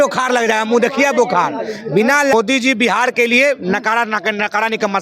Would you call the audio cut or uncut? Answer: cut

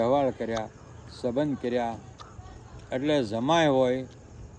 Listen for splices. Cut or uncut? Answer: uncut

